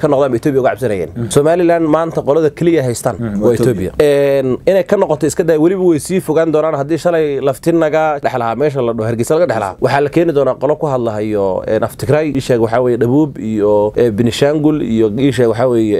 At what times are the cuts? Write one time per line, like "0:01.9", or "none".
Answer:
0:01.1
0:03.2
0:03.9
0:08.2
0:09.7
0:12.4
0:13.9